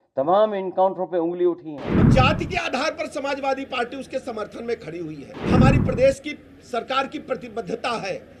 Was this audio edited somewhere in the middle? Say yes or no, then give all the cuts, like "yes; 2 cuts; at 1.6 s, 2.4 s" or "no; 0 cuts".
yes; 2 cuts; at 2.1 s, 5.3 s